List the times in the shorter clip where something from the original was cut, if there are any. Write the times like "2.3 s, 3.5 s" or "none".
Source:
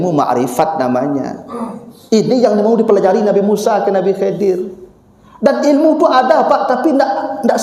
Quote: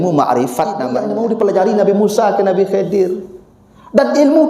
1.0 s